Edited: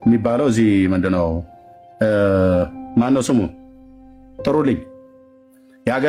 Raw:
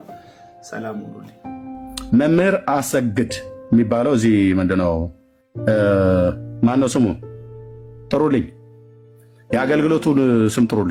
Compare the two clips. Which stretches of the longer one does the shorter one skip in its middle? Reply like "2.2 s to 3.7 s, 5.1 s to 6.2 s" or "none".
none